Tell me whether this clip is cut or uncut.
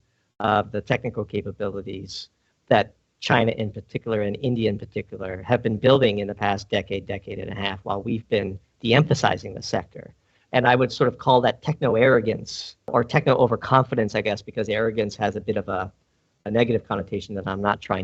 cut